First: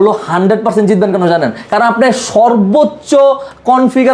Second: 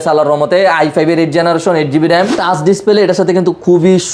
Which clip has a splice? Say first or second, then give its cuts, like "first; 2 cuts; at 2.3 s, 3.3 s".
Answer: second; 1 cut; at 2.4 s